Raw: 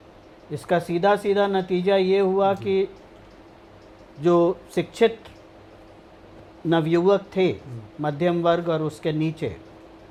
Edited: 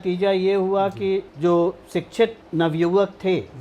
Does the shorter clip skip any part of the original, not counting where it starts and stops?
yes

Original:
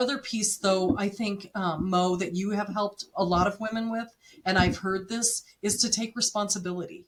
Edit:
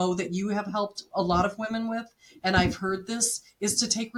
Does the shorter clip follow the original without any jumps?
yes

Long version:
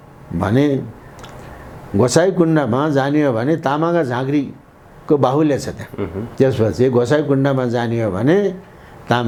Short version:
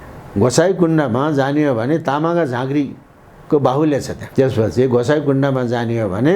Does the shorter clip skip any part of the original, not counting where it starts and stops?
yes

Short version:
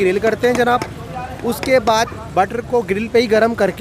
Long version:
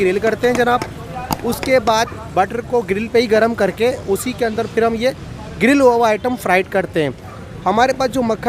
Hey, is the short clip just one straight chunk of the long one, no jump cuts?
yes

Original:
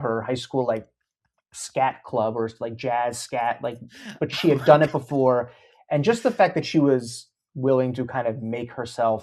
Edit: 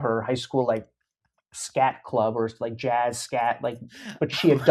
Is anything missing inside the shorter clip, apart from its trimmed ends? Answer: no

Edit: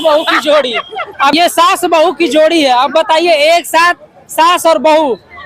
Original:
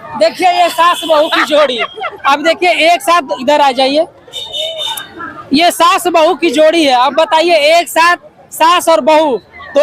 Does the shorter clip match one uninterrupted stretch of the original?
no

